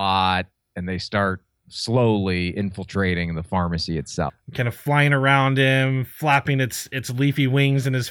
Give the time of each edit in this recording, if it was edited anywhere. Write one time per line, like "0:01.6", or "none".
0:04.4